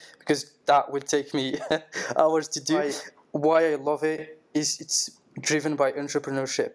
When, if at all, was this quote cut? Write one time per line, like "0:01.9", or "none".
0:02.8